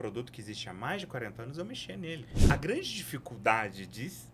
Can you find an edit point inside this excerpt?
yes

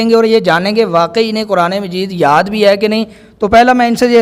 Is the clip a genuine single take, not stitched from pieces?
yes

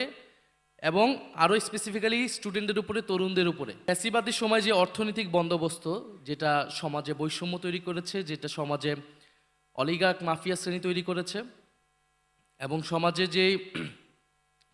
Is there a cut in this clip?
yes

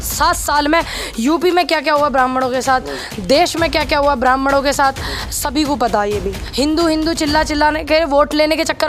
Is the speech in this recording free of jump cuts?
no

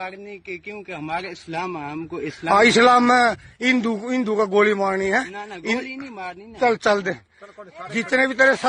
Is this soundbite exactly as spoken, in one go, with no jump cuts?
yes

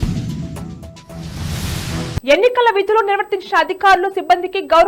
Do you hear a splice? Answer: no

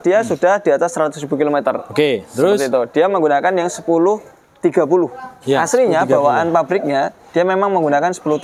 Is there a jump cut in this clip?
no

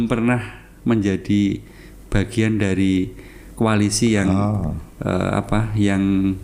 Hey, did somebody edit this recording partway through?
no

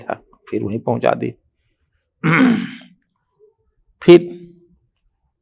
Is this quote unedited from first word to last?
yes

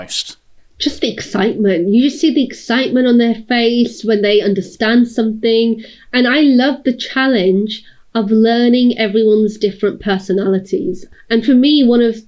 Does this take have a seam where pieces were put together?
yes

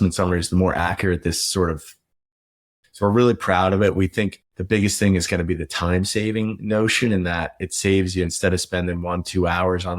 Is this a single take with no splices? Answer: no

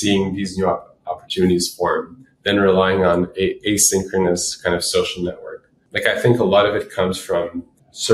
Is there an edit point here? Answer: yes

